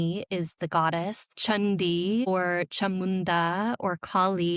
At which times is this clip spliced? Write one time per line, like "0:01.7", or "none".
0:01.3
0:02.3